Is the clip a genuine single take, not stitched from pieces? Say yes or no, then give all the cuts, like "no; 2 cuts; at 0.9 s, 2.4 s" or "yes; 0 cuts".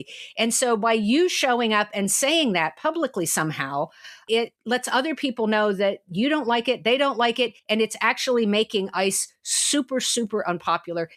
yes; 0 cuts